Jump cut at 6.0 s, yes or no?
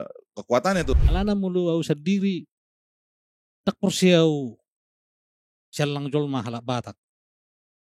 no